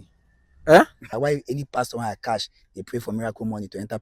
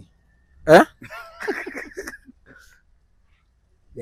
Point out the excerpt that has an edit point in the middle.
first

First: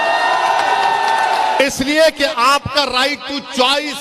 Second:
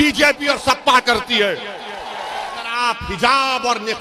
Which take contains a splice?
second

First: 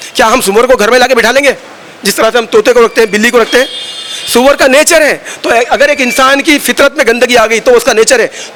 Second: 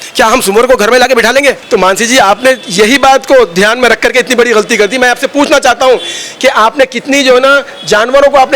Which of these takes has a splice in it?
second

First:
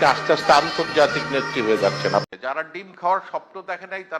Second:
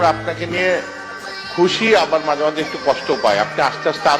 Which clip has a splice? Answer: first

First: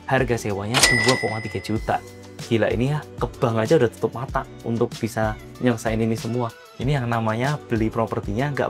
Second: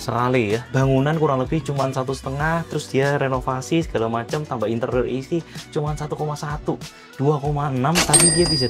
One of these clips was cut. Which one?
first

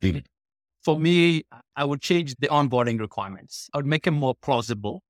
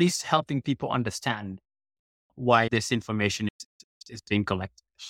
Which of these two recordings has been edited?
first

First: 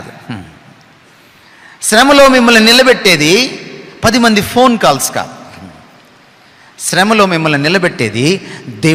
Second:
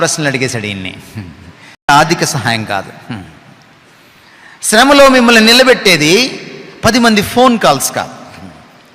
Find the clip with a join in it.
second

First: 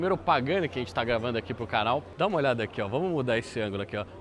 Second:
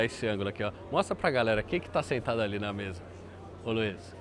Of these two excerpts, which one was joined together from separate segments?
first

